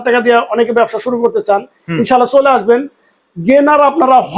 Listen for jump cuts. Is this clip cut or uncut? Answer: uncut